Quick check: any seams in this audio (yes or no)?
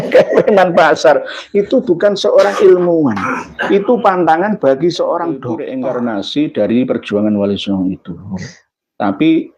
yes